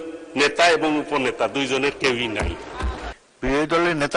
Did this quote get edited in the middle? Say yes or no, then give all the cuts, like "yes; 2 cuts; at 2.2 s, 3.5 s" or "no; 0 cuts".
yes; 1 cut; at 3.1 s